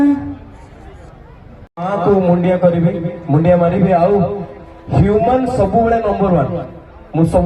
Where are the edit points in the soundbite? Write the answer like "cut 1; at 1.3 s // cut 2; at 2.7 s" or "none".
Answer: cut 1; at 1.9 s

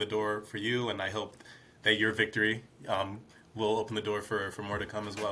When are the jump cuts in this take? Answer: none

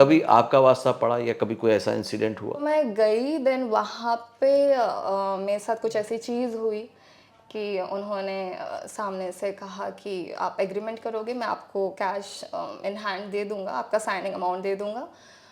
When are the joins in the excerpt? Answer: cut 1; at 2.6 s

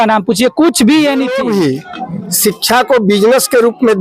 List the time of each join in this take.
cut 1; at 1.3 s

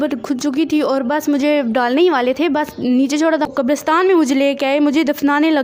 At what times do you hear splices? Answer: cut 1; at 3.5 s

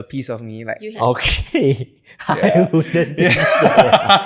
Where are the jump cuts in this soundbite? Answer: none

